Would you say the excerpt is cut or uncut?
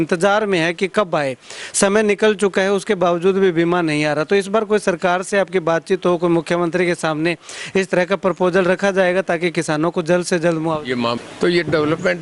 cut